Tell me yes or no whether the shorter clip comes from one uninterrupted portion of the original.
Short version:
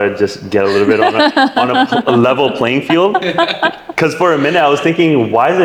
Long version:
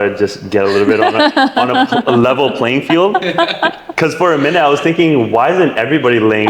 yes